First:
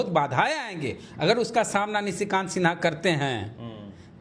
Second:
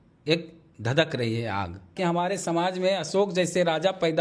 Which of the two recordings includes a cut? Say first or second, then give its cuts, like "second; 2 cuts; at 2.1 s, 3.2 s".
second; 1 cut; at 1.9 s